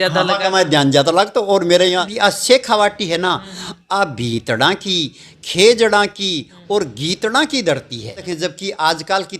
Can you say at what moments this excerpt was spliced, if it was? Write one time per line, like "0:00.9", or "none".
0:02.1
0:08.2